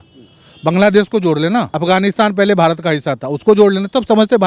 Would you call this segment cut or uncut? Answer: cut